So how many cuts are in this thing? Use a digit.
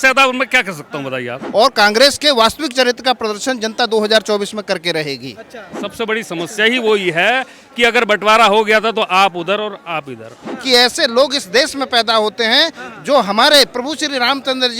3